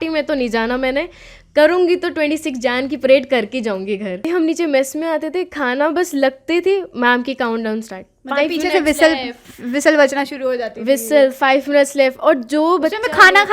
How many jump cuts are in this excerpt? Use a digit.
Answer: 1